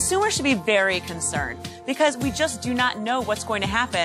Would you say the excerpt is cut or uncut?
uncut